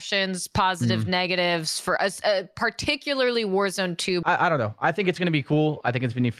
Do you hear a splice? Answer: yes; 1 cut; at 4.2 s

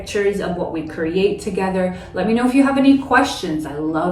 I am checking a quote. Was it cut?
no; 0 cuts

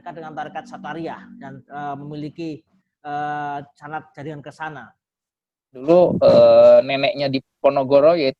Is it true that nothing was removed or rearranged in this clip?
no; 1 cut; at 5.8 s

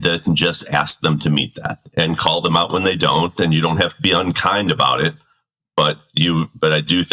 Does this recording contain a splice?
yes; 1 cut; at 1.8 s

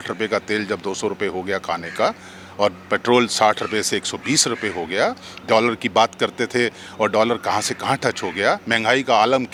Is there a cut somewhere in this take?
no; 0 cuts

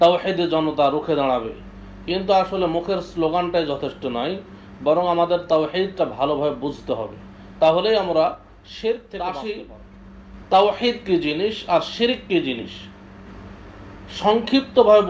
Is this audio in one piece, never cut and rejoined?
no; 1 cut; at 9.5 s

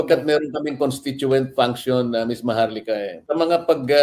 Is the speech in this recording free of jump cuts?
no; 1 cut; at 3.1 s

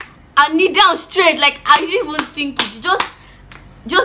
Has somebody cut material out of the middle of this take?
no; 0 cuts

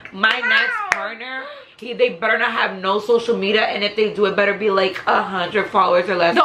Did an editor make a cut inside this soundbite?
no; 0 cuts

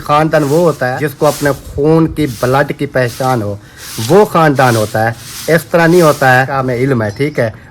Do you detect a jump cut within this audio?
yes; 2 cuts; at 1.0 s, 6.6 s

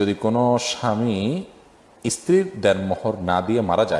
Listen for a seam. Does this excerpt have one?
no; 0 cuts

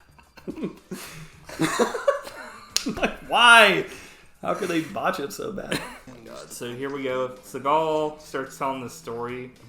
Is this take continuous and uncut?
no; 1 cut; at 5.8 s

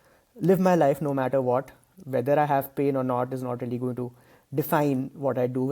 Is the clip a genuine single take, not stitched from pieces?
yes; 0 cuts

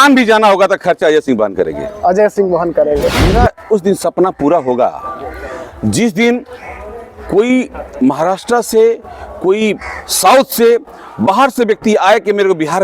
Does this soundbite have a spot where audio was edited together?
yes; 1 cut; at 3.3 s

